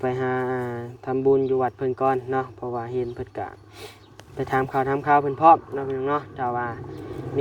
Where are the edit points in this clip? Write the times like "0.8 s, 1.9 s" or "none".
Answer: none